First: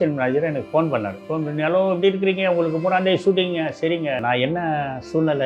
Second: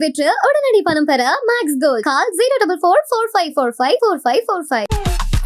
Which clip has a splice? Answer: first; 2 cuts; at 1.2 s, 4.2 s

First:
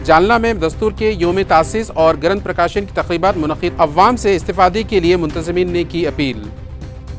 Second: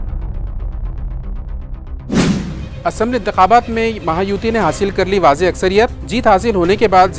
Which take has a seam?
second; 1 cut; at 2.2 s

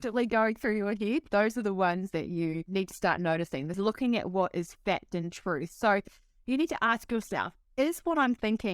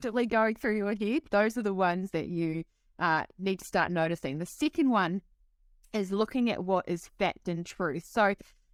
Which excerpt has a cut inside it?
first; 2 cuts; at 2.6 s, 3.8 s

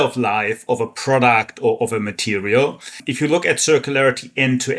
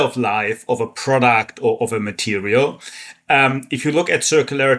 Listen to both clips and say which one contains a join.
first; 1 cut; at 3.0 s

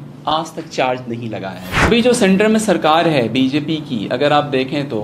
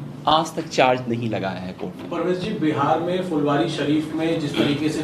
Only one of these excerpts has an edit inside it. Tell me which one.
first; 1 cut; at 1.9 s

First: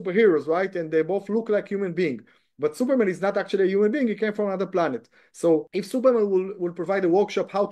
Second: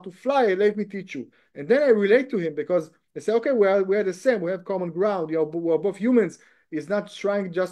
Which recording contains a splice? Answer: first; 1 cut; at 5.7 s

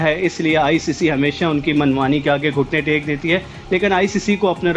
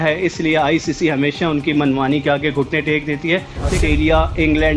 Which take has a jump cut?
second; 1 cut; at 3.8 s

